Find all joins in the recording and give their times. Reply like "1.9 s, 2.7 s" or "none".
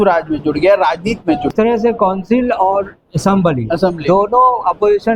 1.5 s